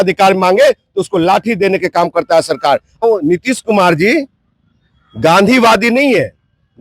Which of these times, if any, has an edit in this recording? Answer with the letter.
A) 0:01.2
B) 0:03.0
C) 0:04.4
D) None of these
B